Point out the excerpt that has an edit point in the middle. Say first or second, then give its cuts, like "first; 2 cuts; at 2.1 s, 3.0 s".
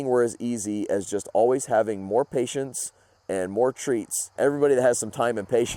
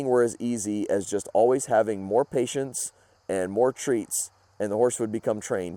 first; 1 cut; at 4.3 s